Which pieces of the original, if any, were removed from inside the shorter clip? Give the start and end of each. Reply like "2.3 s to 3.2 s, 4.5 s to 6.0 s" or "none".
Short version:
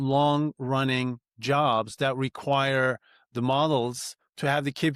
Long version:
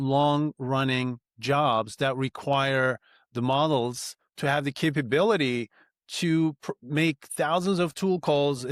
none